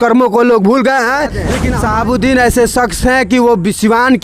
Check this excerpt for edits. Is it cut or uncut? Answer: cut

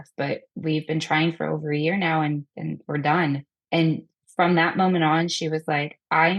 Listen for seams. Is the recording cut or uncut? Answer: cut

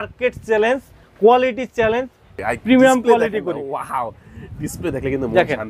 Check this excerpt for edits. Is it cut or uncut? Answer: cut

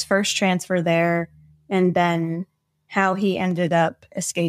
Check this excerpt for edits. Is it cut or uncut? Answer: uncut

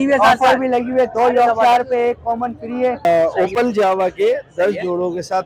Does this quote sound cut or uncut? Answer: cut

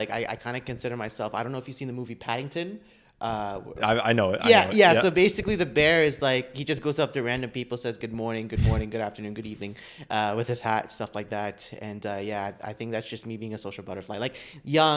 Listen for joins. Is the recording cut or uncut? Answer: uncut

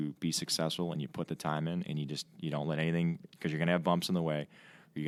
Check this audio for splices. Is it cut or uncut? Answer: uncut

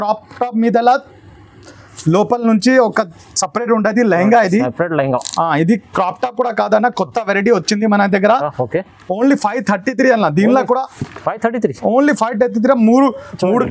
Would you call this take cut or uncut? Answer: uncut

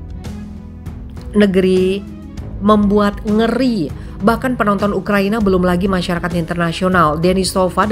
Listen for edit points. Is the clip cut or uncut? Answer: cut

